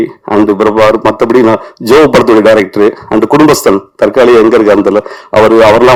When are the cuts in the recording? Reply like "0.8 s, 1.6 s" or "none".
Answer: none